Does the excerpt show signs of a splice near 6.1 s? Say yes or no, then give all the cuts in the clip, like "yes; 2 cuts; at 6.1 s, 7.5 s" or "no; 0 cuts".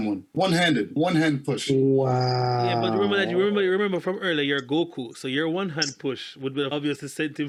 no; 0 cuts